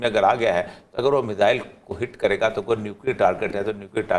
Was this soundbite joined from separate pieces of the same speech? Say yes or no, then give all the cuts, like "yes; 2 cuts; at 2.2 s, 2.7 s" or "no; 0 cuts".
no; 0 cuts